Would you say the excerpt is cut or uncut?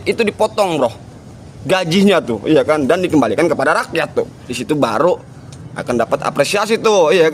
cut